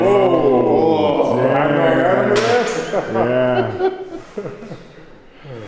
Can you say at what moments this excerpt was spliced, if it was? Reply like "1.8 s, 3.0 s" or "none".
4.1 s